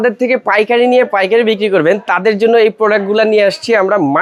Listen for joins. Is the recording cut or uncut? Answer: uncut